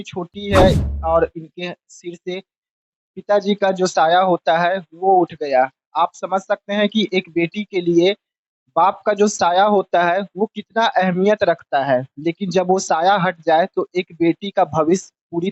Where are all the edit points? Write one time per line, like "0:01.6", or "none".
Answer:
none